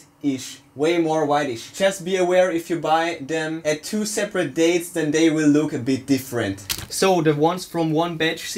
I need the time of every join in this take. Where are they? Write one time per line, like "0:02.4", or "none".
0:01.7
0:03.6
0:06.5